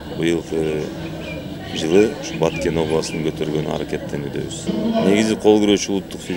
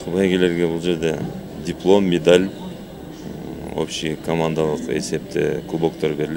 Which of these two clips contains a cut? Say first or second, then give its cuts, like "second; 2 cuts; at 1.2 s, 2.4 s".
first; 1 cut; at 4.7 s